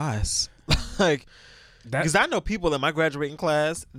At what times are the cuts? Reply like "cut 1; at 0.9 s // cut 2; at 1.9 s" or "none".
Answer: none

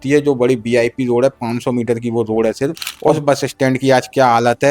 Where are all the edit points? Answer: cut 1; at 2.9 s

